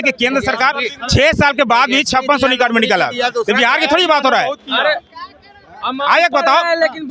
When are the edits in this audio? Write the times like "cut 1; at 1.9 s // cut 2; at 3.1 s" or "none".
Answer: none